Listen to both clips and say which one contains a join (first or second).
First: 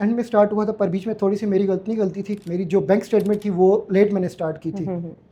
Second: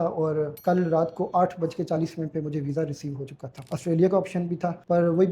second